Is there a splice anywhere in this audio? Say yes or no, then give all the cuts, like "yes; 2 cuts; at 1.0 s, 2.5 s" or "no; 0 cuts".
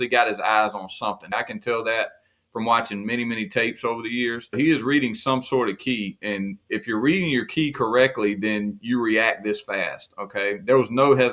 yes; 3 cuts; at 1.3 s, 4.5 s, 6.1 s